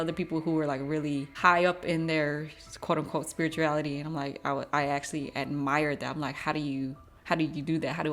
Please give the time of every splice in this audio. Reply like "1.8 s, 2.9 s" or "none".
none